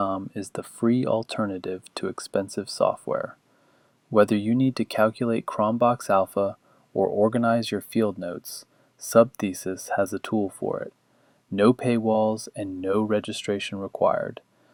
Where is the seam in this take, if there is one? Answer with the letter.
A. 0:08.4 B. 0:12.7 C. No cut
C